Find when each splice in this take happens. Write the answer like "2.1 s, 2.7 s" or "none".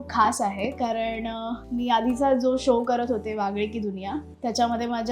1.6 s